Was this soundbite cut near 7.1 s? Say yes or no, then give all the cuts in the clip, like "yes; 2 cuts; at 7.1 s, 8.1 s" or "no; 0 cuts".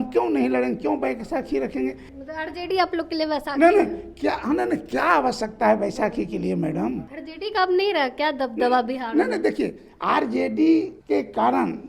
yes; 3 cuts; at 2.1 s, 7.1 s, 11.0 s